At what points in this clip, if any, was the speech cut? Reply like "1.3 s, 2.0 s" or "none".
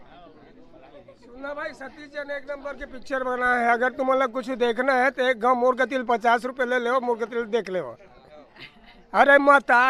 none